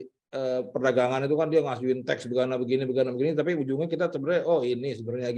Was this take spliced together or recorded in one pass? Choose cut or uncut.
uncut